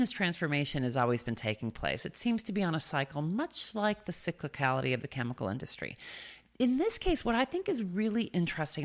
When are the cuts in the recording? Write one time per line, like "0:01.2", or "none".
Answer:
none